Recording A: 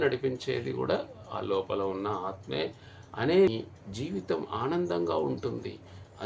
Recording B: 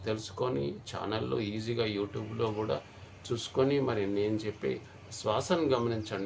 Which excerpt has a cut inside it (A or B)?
A